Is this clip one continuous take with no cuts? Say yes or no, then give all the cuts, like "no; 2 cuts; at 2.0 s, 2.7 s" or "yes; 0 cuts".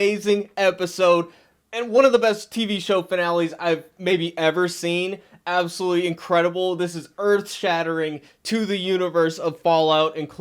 yes; 0 cuts